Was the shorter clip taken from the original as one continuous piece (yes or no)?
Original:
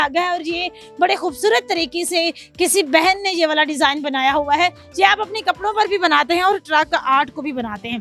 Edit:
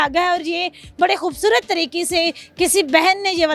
yes